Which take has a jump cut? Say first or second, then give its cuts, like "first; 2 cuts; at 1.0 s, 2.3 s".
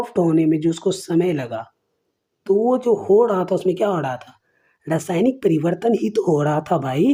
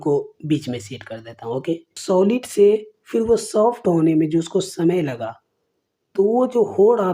second; 1 cut; at 2.0 s